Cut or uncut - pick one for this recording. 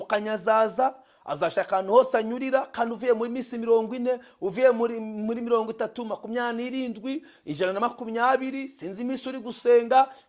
uncut